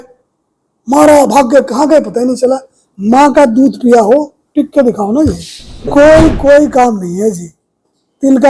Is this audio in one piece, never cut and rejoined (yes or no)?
no